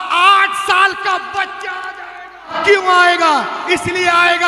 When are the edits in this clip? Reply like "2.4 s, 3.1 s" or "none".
2.5 s